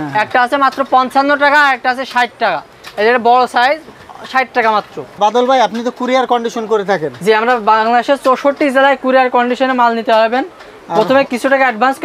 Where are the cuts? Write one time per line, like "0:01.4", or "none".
none

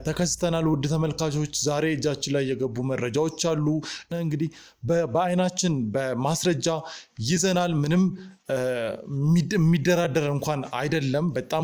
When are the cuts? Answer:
0:04.1

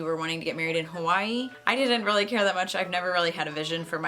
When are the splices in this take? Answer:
0:01.6

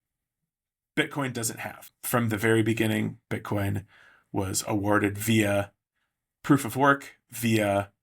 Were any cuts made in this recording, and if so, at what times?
0:01.9

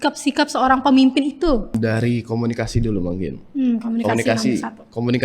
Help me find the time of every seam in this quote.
0:01.7

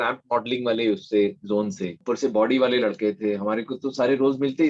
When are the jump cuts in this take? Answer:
0:01.9

